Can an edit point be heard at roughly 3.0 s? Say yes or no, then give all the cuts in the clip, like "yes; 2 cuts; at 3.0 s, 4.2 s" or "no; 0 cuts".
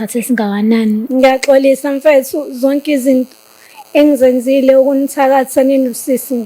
no; 1 cut; at 1.0 s